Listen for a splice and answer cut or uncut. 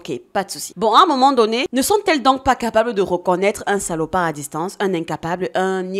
uncut